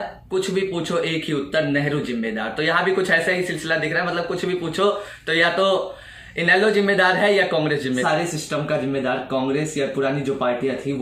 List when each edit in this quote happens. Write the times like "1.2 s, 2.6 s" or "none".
8.0 s